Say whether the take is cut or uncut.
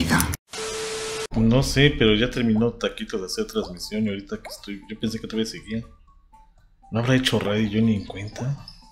cut